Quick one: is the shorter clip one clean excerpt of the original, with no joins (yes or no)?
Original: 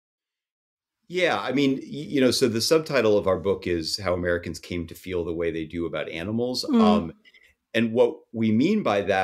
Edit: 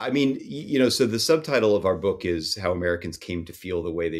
yes